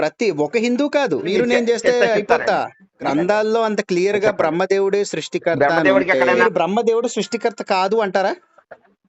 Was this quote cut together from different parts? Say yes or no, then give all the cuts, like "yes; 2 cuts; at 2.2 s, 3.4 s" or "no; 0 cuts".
yes; 3 cuts; at 1.3 s, 3.0 s, 6.4 s